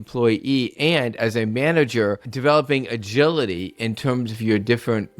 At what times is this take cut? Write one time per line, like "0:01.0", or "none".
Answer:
0:02.3